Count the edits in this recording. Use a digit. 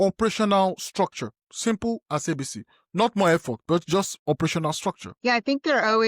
1